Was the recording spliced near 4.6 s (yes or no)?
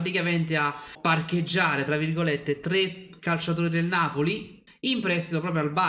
yes